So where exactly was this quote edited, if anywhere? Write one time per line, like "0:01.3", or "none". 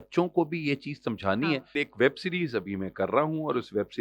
0:01.8